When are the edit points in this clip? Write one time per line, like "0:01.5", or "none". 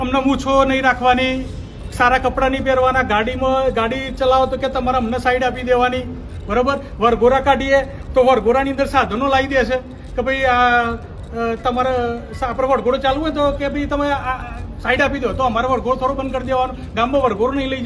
none